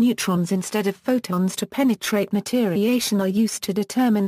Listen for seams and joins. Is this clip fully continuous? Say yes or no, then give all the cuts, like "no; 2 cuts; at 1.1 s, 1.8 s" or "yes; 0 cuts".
yes; 0 cuts